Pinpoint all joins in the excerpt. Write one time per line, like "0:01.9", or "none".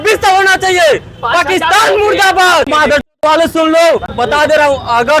0:02.7
0:04.1

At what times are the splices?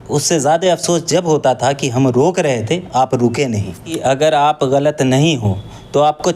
0:03.9

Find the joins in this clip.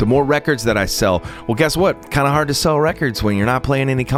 none

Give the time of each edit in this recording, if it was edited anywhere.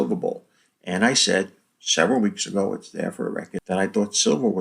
0:03.5

